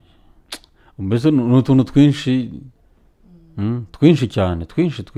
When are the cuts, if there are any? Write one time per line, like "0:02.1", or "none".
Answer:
none